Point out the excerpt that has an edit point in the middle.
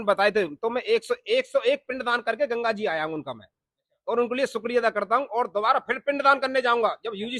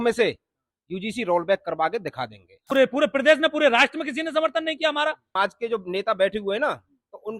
second; 2 cuts; at 2.6 s, 5.3 s

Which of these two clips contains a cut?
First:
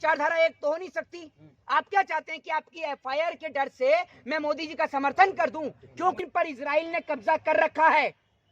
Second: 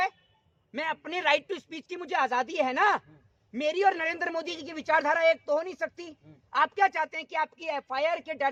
first; 1 cut; at 6.2 s

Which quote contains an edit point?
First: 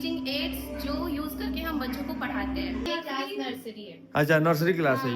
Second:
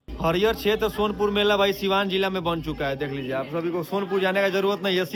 first; 1 cut; at 2.8 s

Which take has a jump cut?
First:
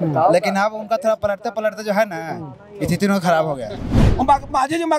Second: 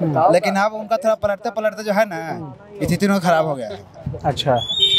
first; 1 cut; at 4.0 s

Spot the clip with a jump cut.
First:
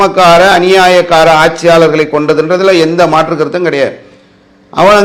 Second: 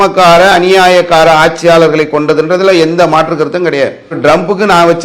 second; 1 cut; at 4.1 s

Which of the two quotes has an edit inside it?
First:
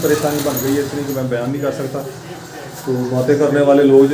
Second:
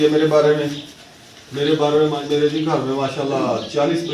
second; 1 cut; at 2.2 s

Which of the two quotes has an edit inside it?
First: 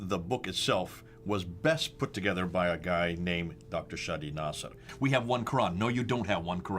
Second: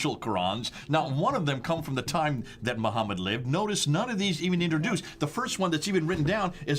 first; 1 cut; at 4.9 s

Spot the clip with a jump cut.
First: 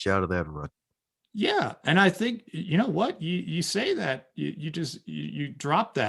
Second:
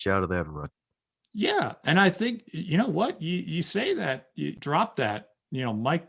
second; 1 cut; at 4.6 s

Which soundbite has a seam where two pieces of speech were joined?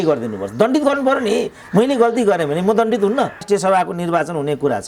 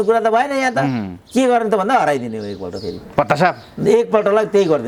first; 1 cut; at 3.4 s

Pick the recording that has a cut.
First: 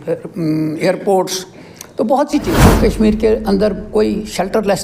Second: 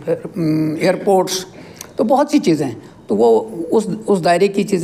first; 1 cut; at 2.6 s

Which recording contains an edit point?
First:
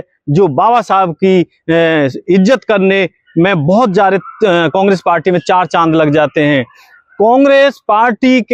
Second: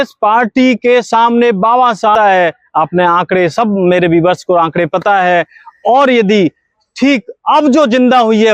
second; 1 cut; at 2.1 s

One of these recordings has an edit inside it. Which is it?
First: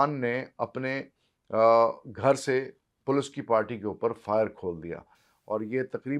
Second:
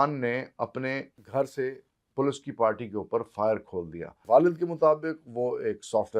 second; 2 cuts; at 1.2 s, 4.2 s

